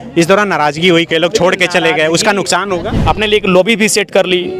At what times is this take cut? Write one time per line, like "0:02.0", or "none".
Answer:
0:02.9